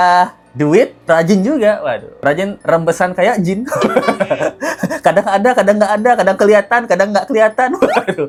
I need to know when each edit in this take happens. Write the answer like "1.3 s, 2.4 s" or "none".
none